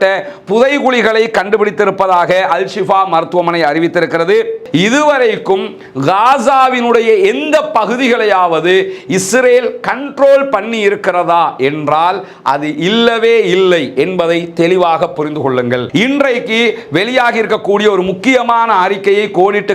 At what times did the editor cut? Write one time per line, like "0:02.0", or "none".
0:04.6
0:15.8